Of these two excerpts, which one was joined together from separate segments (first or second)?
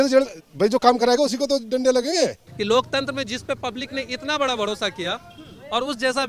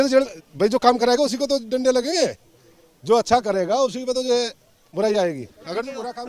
first